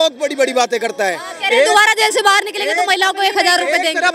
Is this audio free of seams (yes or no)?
yes